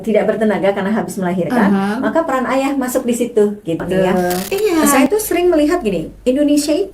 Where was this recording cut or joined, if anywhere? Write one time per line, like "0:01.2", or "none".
0:05.1